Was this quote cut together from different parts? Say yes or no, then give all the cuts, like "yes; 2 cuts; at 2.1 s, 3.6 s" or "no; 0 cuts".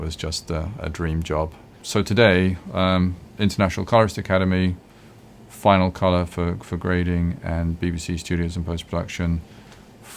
yes; 1 cut; at 1.8 s